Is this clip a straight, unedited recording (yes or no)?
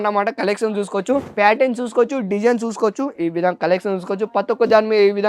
no